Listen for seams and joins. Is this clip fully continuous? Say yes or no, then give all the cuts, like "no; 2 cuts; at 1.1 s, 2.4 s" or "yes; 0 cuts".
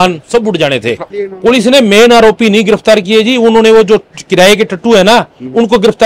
no; 1 cut; at 1.1 s